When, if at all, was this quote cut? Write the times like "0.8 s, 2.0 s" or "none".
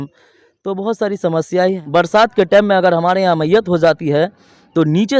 1.8 s